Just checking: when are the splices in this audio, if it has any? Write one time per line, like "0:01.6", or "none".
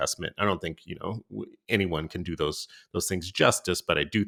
none